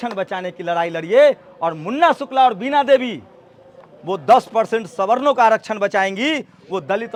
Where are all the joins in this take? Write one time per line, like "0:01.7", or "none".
none